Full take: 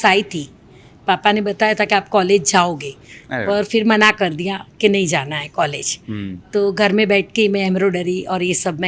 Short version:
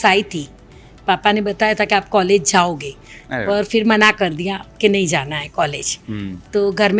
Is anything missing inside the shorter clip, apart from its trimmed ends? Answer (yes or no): no